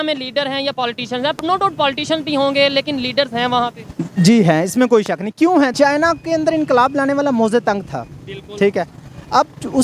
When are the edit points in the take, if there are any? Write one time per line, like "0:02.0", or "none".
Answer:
0:05.7